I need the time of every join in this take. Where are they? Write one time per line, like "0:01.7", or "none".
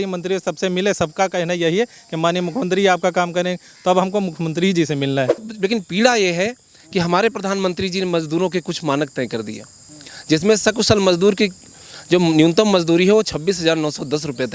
0:05.4